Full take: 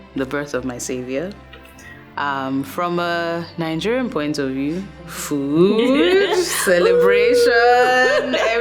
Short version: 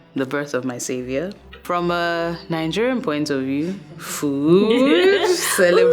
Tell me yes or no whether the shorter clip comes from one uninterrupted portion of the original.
no